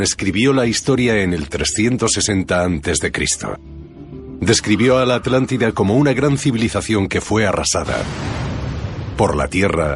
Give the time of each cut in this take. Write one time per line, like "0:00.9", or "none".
none